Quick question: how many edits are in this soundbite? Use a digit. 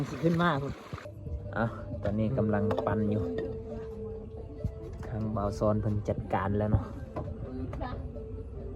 1